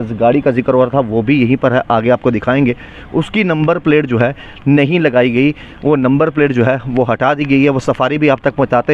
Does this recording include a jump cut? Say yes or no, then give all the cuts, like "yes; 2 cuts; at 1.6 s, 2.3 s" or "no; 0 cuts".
no; 0 cuts